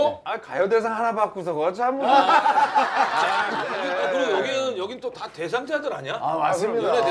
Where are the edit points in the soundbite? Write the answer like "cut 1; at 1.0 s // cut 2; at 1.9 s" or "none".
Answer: cut 1; at 3.7 s